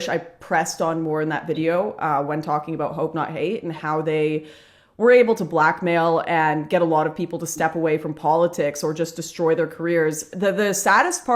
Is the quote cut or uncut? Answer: uncut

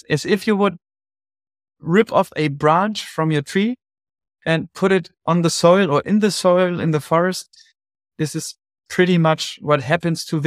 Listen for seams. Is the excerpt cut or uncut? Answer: uncut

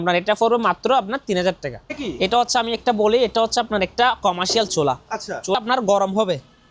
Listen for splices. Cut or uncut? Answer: cut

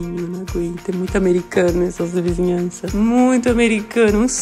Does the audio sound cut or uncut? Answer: uncut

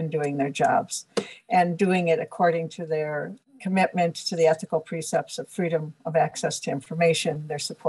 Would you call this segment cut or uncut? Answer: uncut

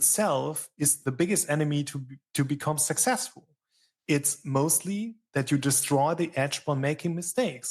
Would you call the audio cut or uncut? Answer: cut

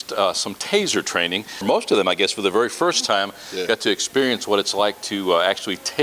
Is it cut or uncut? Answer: cut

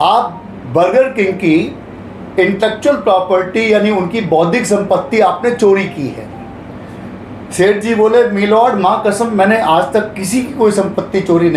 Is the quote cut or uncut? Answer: uncut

